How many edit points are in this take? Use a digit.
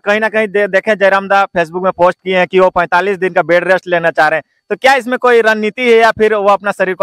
0